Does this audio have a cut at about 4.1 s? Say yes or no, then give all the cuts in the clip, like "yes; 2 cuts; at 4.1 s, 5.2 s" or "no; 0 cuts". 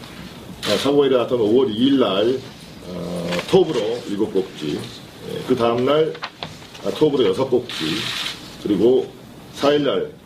yes; 1 cut; at 4.1 s